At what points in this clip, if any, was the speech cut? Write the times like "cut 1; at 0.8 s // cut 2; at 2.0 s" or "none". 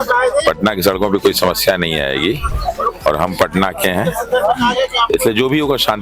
cut 1; at 2.5 s